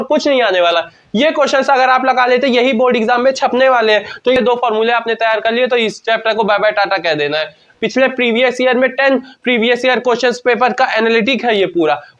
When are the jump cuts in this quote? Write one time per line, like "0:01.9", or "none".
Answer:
0:04.4
0:07.6